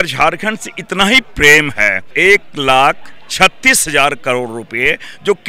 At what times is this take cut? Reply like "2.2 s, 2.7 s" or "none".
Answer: 2.1 s